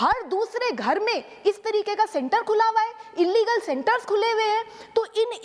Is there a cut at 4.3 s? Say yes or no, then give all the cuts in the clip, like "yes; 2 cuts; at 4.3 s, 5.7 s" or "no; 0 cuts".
no; 0 cuts